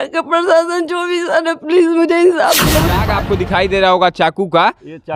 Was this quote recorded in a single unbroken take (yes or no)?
no